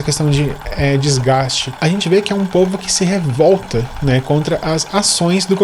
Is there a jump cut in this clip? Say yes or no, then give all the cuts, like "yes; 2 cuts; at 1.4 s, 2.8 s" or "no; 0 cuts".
yes; 1 cut; at 1.6 s